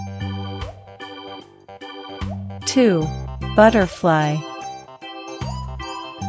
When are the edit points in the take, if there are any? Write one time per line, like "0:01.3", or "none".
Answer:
none